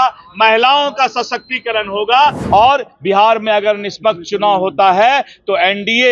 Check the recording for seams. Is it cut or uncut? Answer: cut